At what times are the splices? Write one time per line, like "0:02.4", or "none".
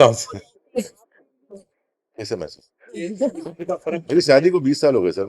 0:01.5